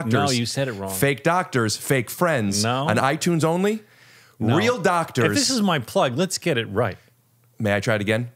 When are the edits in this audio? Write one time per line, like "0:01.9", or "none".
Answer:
none